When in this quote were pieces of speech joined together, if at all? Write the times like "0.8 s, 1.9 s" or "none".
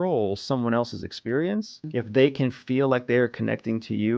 1.8 s